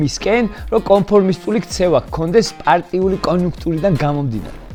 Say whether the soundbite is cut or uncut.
uncut